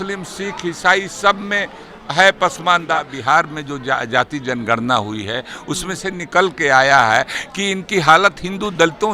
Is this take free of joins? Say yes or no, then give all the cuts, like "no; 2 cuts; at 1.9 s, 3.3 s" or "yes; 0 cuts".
no; 1 cut; at 3.1 s